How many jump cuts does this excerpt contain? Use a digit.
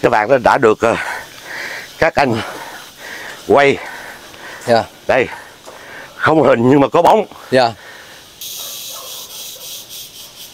1